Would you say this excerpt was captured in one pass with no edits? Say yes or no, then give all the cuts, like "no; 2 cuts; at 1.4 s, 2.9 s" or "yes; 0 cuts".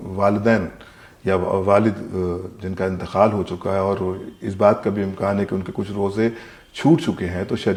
yes; 0 cuts